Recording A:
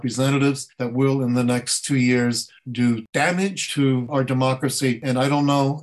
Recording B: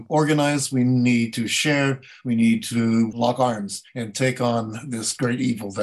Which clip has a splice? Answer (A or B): A